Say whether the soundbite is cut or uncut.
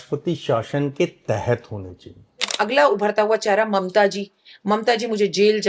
cut